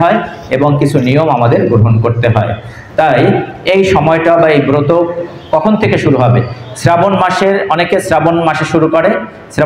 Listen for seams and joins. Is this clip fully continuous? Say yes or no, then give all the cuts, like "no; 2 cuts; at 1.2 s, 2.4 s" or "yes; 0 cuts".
yes; 0 cuts